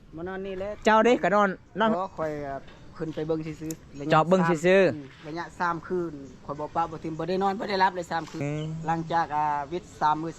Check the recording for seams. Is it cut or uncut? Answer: cut